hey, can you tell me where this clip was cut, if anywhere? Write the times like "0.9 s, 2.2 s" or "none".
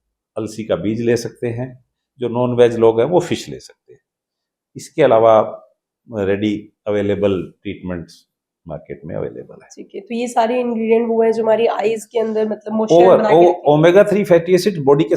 none